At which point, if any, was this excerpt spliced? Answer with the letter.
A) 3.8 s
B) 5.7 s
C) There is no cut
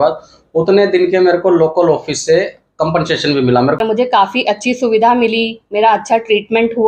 A